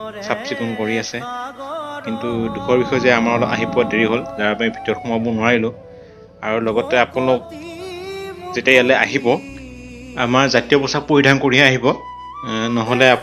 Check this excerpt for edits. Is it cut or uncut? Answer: uncut